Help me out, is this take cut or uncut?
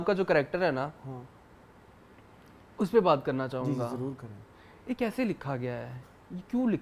uncut